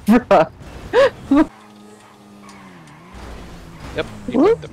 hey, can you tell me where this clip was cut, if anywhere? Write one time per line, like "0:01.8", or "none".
0:01.5